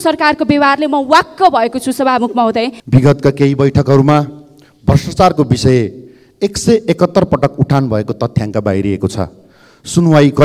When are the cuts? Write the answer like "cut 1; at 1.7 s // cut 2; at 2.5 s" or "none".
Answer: cut 1; at 2.8 s

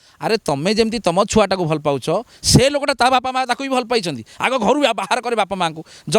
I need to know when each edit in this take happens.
none

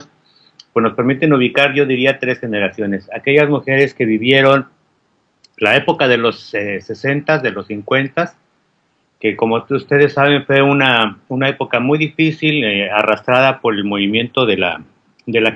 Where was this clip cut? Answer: none

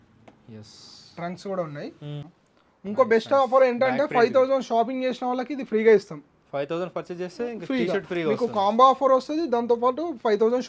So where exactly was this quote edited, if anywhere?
cut 1; at 2.4 s

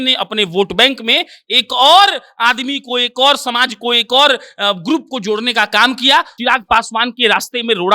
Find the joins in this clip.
cut 1; at 6.3 s

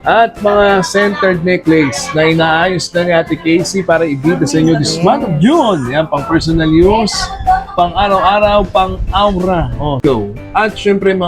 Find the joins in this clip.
cut 1; at 10.0 s

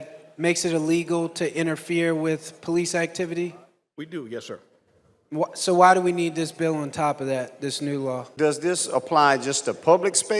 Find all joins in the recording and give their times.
cut 1; at 8.3 s

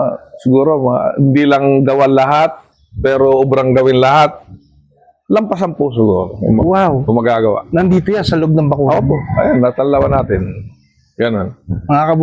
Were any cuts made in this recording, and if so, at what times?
none

